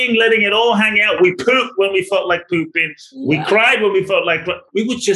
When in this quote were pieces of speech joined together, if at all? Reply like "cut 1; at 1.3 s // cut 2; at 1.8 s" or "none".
none

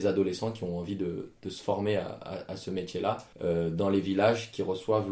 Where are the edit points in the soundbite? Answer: cut 1; at 3.3 s

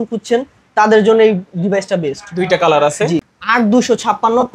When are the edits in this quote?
cut 1; at 3.4 s

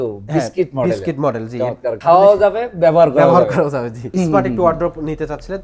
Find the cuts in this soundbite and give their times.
cut 1; at 4.1 s

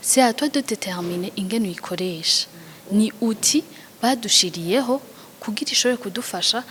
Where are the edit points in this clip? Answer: none

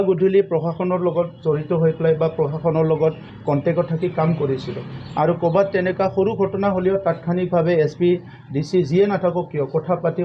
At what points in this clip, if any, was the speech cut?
none

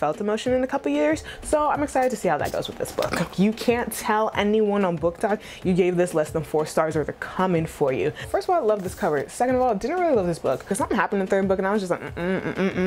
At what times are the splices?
cut 1; at 3.3 s // cut 2; at 8.2 s // cut 3; at 10.7 s

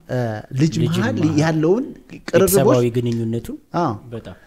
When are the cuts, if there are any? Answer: none

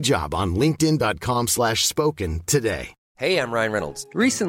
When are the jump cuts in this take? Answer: cut 1; at 3.0 s

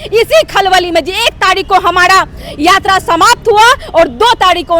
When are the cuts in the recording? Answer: none

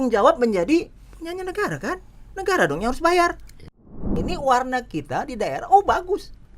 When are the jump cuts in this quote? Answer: cut 1; at 4.1 s

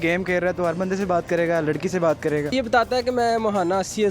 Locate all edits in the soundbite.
cut 1; at 2.5 s

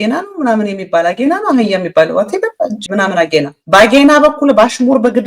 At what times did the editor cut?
none

